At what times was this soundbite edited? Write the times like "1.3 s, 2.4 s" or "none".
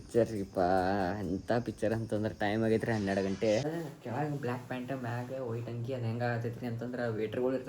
3.6 s